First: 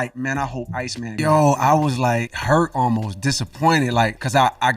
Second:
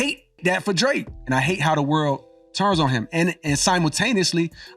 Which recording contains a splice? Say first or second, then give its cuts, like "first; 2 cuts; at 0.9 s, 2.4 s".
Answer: first; 1 cut; at 1.2 s